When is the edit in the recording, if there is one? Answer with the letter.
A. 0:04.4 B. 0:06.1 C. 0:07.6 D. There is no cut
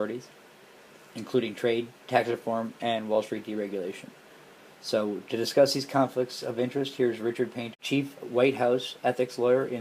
C